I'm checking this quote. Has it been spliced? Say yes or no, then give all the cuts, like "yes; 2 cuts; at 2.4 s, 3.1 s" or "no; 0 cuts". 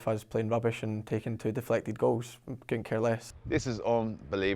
yes; 1 cut; at 3.3 s